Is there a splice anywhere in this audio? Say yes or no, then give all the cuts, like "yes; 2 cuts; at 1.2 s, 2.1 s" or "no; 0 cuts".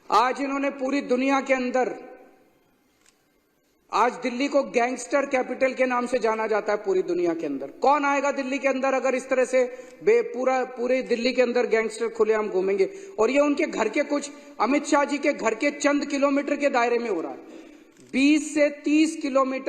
no; 0 cuts